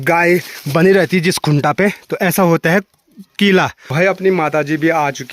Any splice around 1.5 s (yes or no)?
no